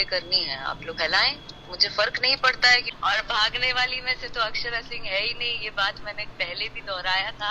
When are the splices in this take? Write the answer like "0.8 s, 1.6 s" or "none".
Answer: 2.9 s